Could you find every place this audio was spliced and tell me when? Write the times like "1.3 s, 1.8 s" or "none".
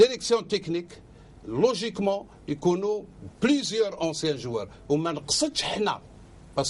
none